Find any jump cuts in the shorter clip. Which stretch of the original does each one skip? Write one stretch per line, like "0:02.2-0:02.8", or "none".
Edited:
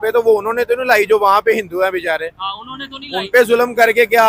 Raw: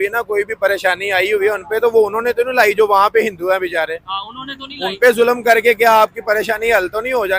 none